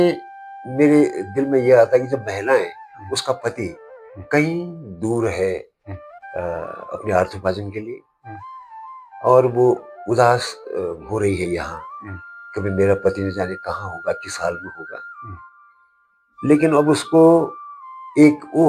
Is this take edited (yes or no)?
no